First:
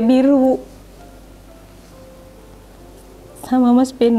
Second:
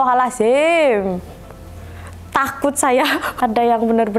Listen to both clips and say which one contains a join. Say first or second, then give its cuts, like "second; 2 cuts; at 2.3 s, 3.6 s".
second; 1 cut; at 3.3 s